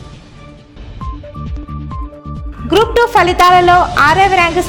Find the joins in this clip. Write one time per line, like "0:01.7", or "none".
0:02.5